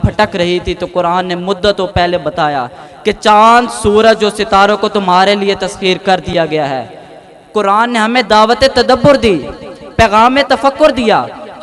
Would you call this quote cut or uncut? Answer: uncut